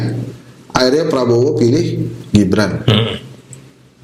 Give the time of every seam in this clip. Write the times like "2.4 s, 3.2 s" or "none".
none